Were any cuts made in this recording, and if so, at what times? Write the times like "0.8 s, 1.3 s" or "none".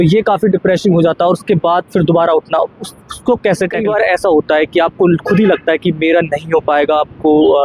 3.8 s